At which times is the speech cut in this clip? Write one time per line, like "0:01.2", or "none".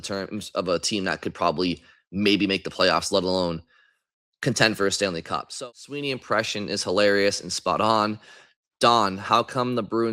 0:05.5